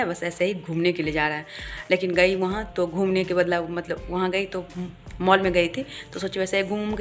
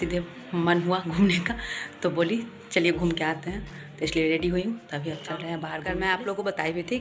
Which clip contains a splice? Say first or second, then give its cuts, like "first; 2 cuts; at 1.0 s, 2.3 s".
second; 1 cut; at 5.7 s